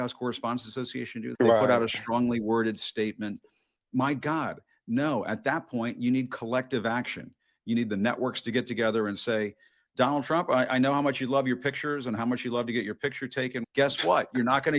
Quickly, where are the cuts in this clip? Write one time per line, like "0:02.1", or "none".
0:01.2
0:13.6